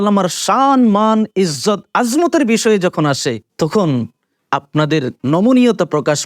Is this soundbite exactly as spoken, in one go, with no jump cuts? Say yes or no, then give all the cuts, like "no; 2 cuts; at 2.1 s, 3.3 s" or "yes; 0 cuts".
yes; 0 cuts